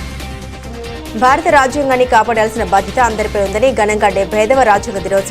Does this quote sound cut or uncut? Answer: uncut